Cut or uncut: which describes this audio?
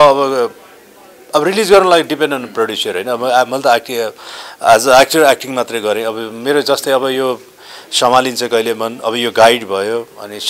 uncut